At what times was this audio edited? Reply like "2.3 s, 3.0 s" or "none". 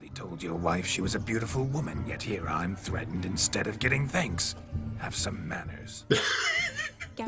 none